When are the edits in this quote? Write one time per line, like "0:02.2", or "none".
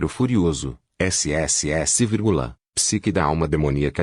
0:00.8
0:02.6

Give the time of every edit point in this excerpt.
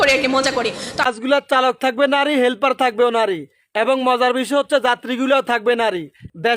0:01.0

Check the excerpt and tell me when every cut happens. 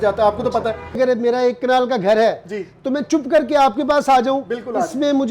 0:01.0

